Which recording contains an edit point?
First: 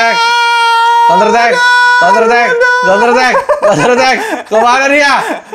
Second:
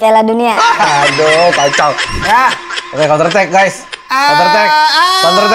second; 1 cut; at 2.1 s

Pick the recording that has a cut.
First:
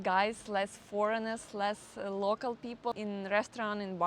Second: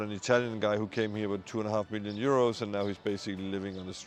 first; 1 cut; at 2.9 s

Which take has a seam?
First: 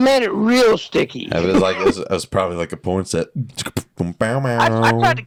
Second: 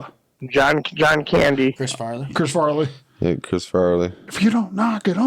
second; 2 cuts; at 1.8 s, 4.2 s

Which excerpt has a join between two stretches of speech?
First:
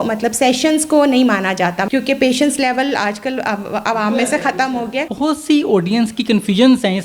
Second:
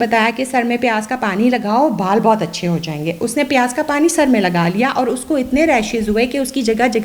first; 2 cuts; at 1.8 s, 5.1 s

